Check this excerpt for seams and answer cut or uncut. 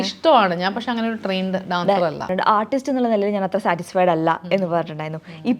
cut